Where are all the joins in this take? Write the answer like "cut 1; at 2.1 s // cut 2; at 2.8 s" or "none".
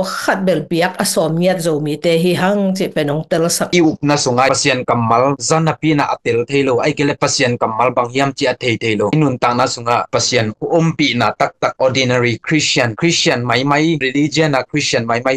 cut 1; at 3.7 s // cut 2; at 4.5 s